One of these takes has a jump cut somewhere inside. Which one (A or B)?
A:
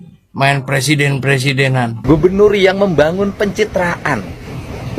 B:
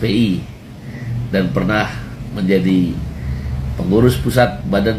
A